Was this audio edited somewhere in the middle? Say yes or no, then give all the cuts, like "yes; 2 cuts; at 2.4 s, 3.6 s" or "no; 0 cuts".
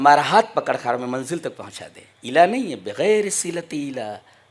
no; 0 cuts